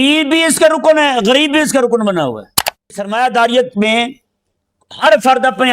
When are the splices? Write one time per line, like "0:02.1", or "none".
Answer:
0:03.0

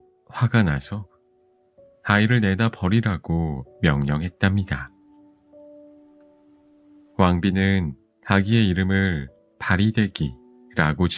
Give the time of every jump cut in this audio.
none

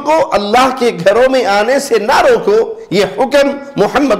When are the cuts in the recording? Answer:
none

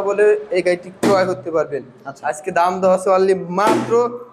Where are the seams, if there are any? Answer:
none

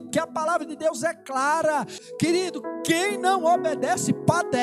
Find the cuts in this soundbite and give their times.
0:02.0

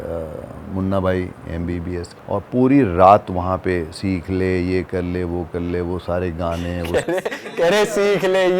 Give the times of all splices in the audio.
0:02.1
0:06.9

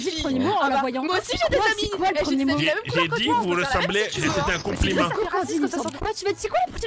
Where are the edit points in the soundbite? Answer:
0:06.0

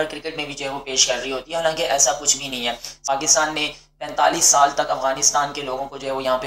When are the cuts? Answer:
0:03.0

